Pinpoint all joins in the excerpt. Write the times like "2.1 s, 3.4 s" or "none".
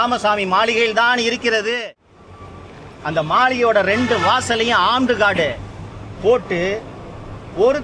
1.8 s